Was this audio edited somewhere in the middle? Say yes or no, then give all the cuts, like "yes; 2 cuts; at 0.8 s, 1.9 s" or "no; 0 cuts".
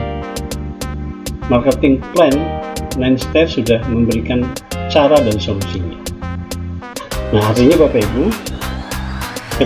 yes; 2 cuts; at 5.8 s, 7.3 s